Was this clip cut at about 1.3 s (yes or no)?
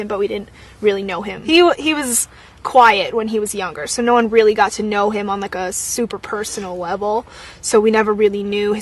yes